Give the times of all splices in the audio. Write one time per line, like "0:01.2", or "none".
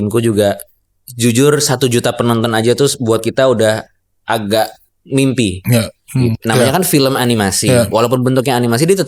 0:06.3